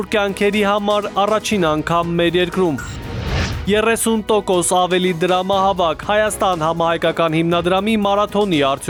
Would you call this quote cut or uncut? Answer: uncut